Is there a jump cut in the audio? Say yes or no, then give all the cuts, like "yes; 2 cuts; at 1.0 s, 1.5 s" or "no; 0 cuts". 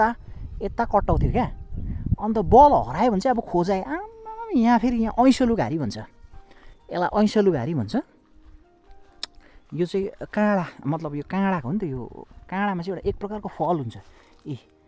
no; 0 cuts